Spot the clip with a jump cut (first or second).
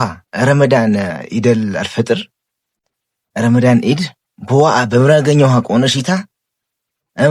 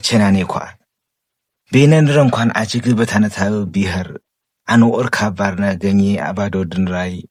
first